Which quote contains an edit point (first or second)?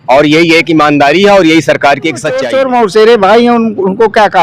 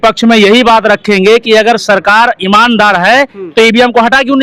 first